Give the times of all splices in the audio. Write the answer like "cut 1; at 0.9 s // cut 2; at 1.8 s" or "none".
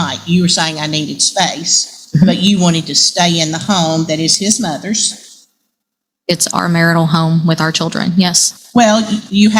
none

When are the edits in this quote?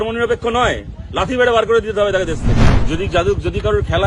cut 1; at 2.7 s

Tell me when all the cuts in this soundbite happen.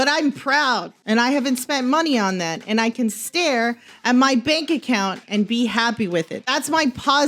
cut 1; at 0.9 s // cut 2; at 6.4 s

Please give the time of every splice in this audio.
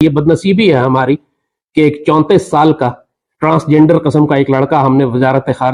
none

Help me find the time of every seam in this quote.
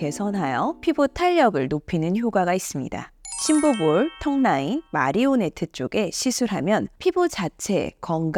none

